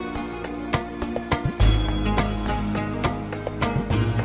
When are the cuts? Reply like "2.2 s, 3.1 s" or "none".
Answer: none